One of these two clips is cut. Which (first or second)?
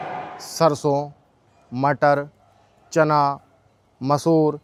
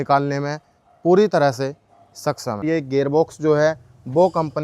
second